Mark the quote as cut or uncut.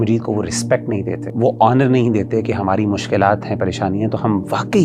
cut